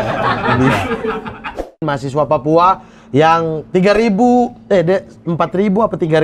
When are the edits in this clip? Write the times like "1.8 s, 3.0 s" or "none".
1.8 s

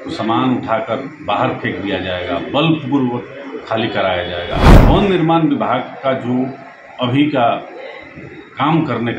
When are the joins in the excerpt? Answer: 4.7 s

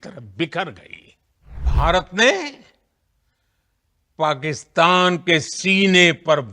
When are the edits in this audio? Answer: 1.6 s

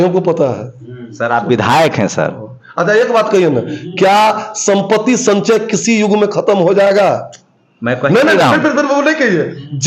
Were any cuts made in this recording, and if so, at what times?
none

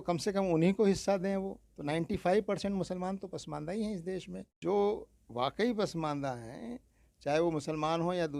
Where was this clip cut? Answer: 4.4 s

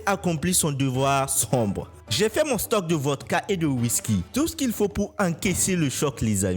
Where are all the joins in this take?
2.0 s

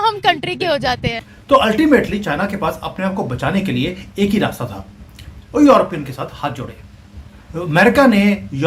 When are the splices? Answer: 1.1 s

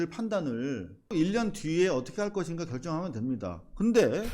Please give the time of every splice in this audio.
1.1 s

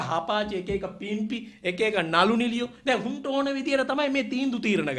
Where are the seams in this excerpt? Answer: none

